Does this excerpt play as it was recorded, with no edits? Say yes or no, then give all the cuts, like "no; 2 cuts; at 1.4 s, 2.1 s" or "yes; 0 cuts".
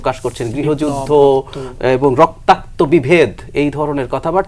yes; 0 cuts